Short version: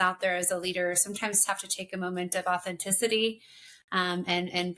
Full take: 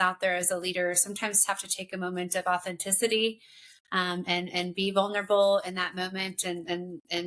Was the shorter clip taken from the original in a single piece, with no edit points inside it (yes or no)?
yes